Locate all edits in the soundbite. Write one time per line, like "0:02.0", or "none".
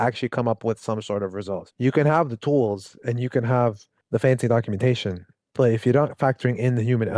0:01.7
0:03.9